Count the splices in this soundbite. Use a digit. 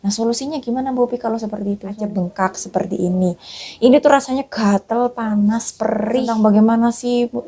2